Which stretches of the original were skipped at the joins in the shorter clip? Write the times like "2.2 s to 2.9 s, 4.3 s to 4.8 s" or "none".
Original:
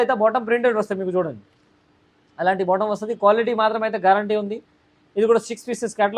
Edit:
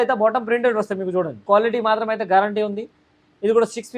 1.4 s to 3.1 s